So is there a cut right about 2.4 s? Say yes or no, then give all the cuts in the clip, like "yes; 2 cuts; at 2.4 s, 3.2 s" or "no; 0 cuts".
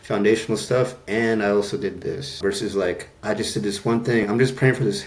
yes; 1 cut; at 2.4 s